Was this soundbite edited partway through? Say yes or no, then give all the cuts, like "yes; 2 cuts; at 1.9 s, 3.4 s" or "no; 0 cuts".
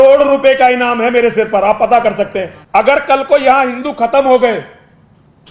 yes; 1 cut; at 2.5 s